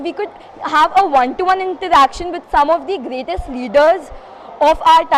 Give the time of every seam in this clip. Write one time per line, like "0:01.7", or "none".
none

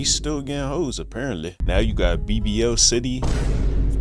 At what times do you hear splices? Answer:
0:01.6

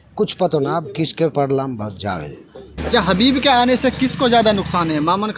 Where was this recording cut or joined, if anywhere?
0:02.7

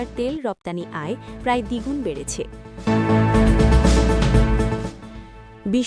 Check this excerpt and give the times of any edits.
0:02.7
0:04.9

